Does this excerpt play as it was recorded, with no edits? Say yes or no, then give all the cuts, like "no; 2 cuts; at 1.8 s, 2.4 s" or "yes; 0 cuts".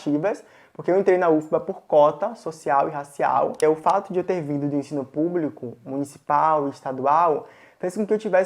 no; 1 cut; at 3.6 s